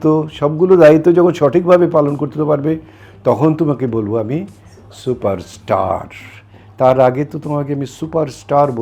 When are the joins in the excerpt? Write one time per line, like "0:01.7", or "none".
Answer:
none